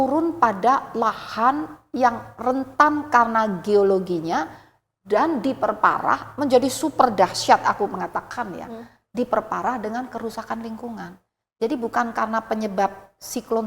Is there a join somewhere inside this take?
no; 0 cuts

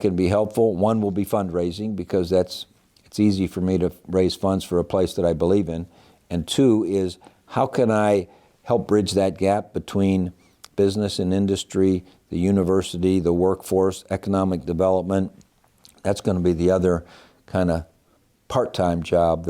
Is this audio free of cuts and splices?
yes; 0 cuts

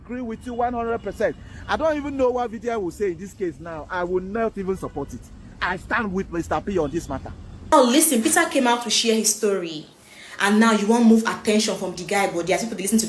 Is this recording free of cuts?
no; 1 cut; at 7.7 s

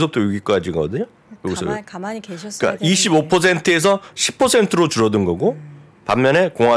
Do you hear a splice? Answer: no; 0 cuts

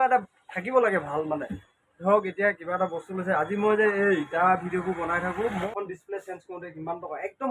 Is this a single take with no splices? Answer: no; 1 cut; at 5.7 s

